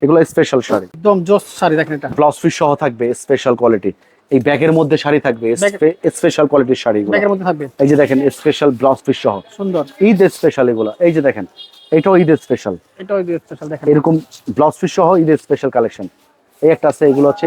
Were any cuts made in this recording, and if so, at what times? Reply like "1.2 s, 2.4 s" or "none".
0.9 s